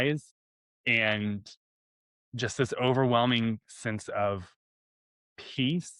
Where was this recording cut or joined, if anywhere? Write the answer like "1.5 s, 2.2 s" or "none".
none